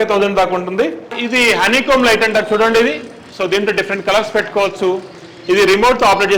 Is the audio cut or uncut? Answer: cut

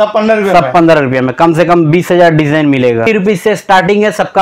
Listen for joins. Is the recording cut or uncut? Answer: cut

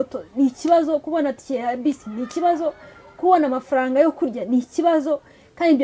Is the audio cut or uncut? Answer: uncut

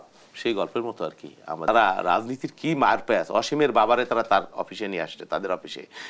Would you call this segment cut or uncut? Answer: cut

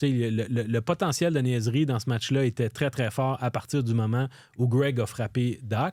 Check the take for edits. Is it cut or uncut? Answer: uncut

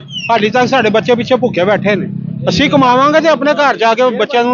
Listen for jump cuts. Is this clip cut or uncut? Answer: uncut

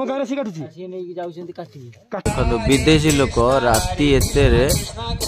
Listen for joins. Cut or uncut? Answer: cut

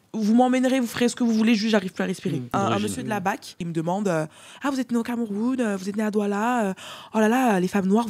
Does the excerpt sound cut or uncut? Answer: cut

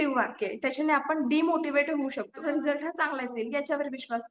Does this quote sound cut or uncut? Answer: cut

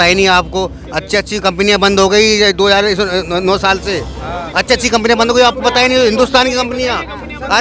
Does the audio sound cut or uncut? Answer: uncut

